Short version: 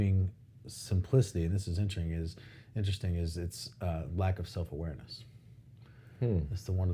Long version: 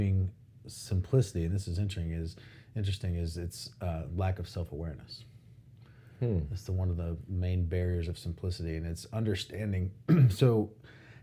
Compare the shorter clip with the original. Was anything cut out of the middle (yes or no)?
no